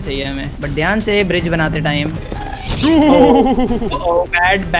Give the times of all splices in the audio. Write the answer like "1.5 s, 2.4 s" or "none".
none

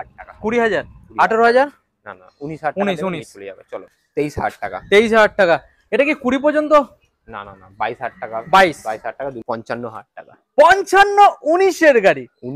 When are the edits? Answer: 3.8 s, 9.5 s

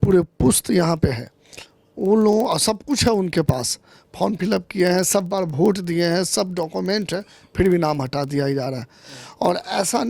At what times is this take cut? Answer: none

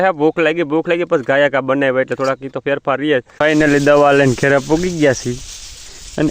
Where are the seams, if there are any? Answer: 3.3 s

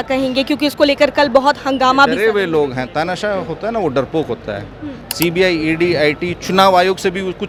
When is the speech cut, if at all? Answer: none

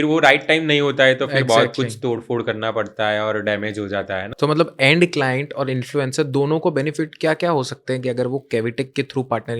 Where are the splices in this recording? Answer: 4.3 s

